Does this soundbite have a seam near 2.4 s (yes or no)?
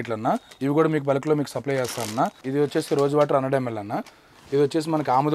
yes